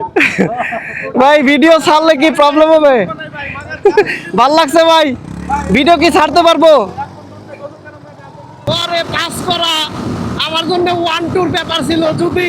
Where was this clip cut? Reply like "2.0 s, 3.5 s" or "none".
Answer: 8.7 s